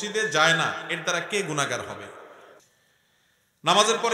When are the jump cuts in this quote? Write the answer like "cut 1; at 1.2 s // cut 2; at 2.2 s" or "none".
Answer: cut 1; at 2.5 s